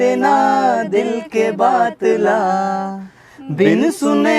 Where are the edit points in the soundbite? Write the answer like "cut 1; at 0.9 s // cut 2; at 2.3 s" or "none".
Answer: none